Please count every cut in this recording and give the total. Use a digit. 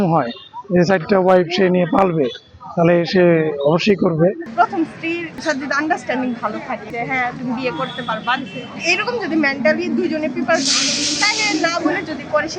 3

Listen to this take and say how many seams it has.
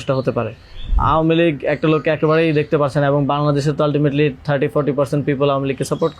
1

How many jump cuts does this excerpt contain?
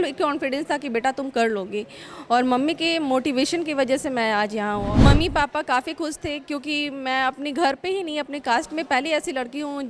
1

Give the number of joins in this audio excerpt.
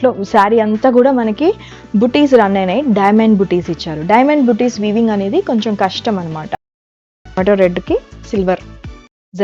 1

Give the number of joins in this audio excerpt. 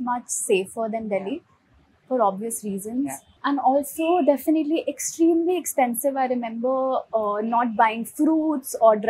1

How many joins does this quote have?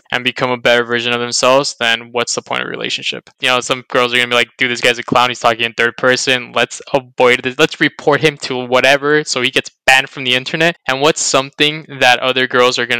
2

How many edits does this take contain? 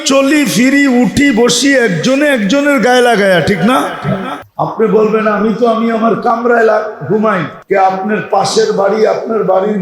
2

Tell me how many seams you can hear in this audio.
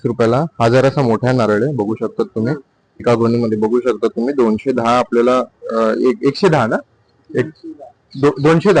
1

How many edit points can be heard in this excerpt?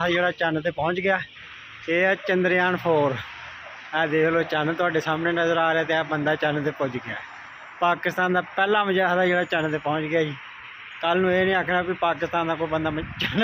0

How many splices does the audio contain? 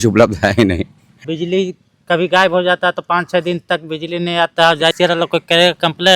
2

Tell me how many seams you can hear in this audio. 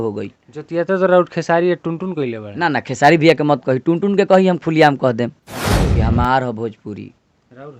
1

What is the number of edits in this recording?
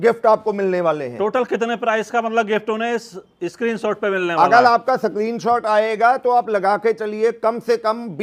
0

